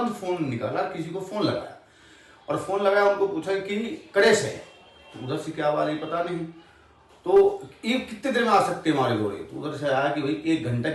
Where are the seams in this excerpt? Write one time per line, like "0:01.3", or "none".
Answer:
none